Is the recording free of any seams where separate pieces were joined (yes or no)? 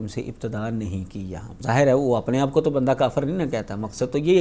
no